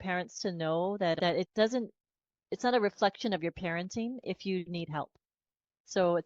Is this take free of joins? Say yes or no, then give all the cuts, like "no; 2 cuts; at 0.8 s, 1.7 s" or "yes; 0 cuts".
no; 1 cut; at 1.2 s